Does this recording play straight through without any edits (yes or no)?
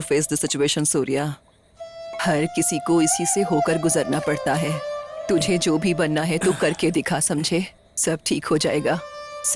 yes